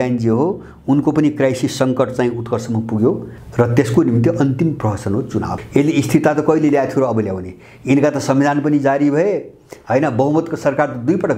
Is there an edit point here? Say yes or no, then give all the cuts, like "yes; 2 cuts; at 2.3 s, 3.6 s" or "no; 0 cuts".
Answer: yes; 2 cuts; at 3.3 s, 5.5 s